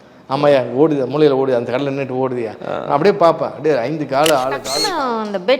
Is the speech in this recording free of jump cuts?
no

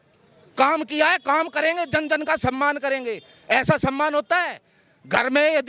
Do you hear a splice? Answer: no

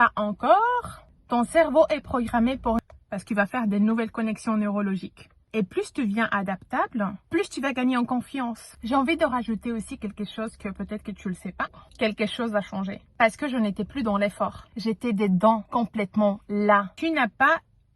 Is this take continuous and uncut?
no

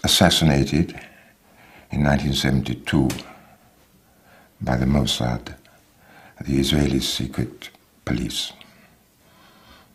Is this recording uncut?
yes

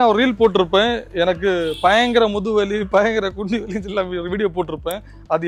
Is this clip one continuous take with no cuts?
yes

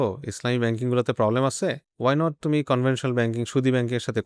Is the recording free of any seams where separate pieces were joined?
yes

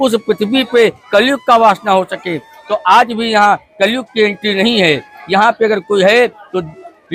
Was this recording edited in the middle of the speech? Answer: no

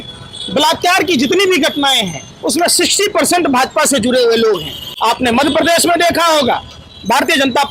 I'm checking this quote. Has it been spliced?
no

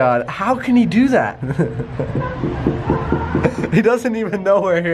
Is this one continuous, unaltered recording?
yes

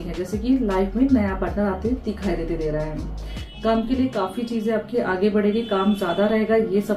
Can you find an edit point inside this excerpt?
no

